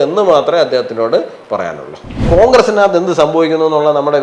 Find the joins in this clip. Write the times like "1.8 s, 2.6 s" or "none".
2.3 s